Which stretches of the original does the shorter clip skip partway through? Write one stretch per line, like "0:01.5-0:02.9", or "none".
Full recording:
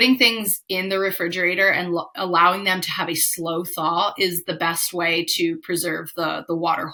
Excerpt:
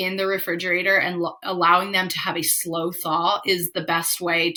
none